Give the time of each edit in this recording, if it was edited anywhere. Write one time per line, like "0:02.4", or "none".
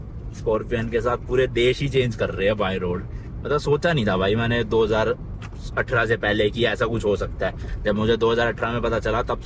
none